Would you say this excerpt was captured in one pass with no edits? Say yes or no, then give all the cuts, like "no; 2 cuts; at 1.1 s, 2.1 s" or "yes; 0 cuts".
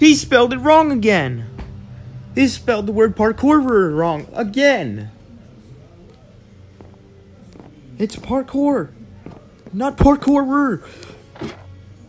yes; 0 cuts